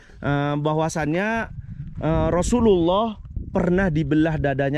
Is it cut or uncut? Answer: uncut